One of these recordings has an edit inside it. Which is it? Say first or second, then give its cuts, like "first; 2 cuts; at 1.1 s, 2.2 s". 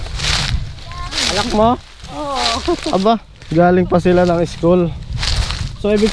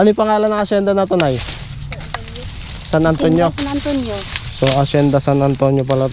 first; 1 cut; at 3.3 s